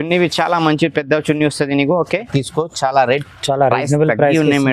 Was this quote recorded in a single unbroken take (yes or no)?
no